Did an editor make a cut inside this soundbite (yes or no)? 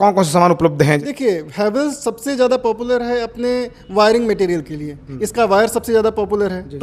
yes